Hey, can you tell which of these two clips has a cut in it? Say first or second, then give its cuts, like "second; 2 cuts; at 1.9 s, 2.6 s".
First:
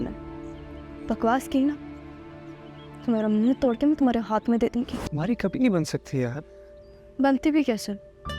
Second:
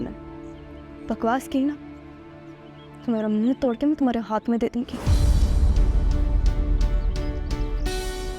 first; 1 cut; at 5.0 s